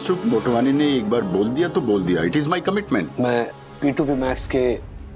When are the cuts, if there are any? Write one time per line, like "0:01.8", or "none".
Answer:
0:03.1

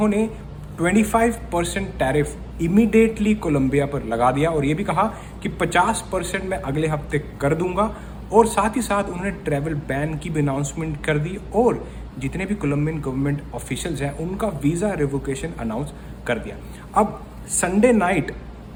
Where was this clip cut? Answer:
none

